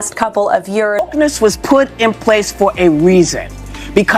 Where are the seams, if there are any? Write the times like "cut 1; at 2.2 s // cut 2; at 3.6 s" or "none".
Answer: cut 1; at 1.1 s